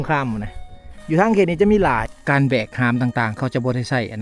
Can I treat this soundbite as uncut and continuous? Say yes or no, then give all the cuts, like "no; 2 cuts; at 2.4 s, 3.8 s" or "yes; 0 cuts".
no; 1 cut; at 2.1 s